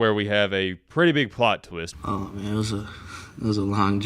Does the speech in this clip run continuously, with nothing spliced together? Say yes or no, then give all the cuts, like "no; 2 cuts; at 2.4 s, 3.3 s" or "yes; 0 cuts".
no; 1 cut; at 1.8 s